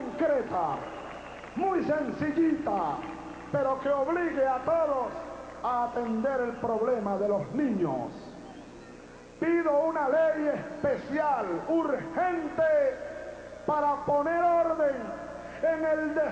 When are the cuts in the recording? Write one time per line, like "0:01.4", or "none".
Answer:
0:04.0